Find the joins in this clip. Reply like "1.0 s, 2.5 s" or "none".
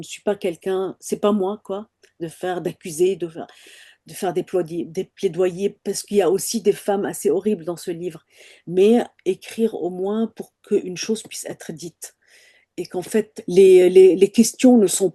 13.4 s